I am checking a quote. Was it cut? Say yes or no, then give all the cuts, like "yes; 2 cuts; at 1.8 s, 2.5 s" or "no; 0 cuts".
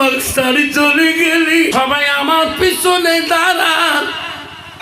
yes; 1 cut; at 1.7 s